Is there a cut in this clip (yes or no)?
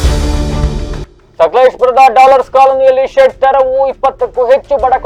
no